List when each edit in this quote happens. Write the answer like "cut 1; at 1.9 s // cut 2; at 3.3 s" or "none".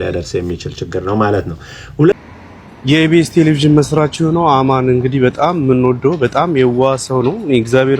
cut 1; at 2.1 s